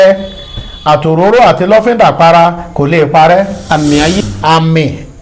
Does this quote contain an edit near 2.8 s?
no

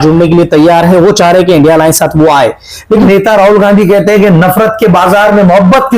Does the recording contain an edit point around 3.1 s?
yes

